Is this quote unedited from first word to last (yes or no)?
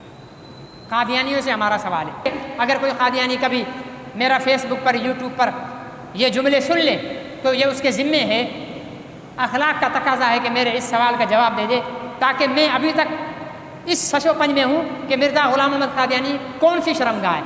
no